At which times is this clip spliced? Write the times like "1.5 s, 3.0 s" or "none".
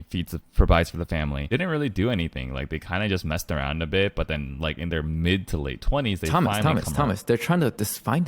1.4 s